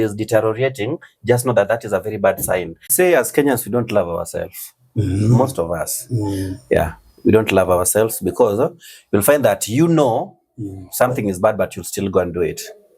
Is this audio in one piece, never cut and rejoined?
no; 1 cut; at 2.9 s

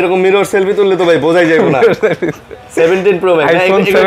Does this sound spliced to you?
no; 0 cuts

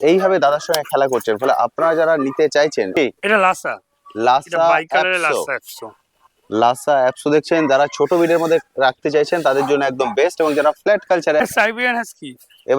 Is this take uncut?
no; 2 cuts; at 3.0 s, 11.4 s

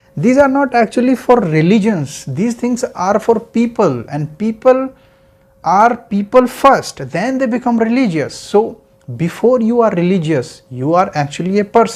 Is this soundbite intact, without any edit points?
yes; 0 cuts

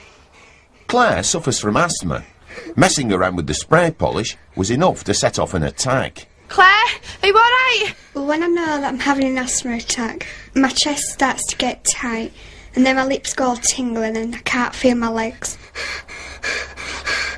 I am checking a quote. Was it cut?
yes; 1 cut; at 1.4 s

